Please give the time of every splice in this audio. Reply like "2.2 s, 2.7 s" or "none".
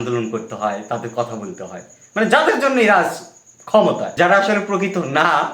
4.1 s